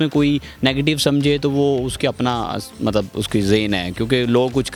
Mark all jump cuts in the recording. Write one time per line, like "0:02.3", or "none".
none